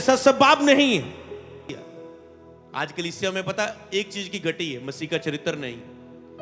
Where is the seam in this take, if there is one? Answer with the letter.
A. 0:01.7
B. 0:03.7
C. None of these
A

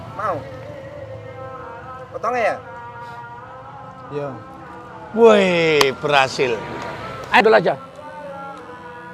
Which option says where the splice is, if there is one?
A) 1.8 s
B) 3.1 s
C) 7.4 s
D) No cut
C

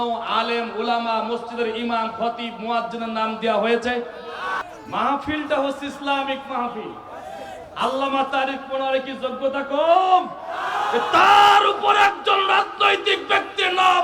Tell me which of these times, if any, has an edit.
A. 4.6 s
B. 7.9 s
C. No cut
A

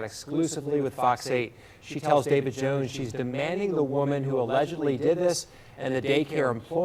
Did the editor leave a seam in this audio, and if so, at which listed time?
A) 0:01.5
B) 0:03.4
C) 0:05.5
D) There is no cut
D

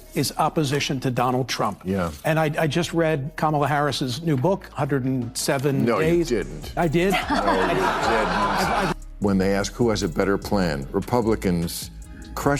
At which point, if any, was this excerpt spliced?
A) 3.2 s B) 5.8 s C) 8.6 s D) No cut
C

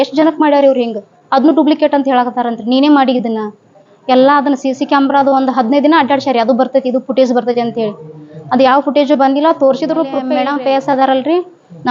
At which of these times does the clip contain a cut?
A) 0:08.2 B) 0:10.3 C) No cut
B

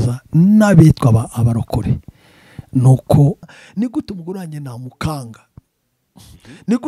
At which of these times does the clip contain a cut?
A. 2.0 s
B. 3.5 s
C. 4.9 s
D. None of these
B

